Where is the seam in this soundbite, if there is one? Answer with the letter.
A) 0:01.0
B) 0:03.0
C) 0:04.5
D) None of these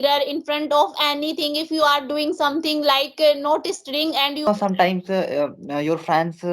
C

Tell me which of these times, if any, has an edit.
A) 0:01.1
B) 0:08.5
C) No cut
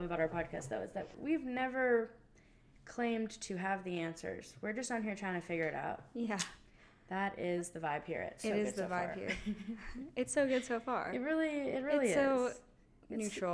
A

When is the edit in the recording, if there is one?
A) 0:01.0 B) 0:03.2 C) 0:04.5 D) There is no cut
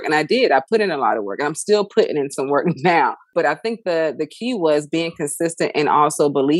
B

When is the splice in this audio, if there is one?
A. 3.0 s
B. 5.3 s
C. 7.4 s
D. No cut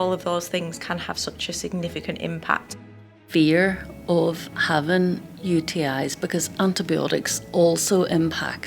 A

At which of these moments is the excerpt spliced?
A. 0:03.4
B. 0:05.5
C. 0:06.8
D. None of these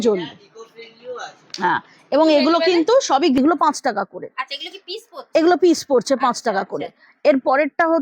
A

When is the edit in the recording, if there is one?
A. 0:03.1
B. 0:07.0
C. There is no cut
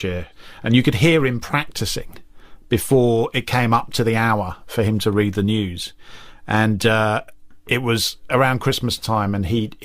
B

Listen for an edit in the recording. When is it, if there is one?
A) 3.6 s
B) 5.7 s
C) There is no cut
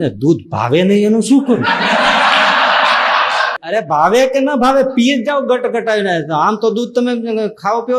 A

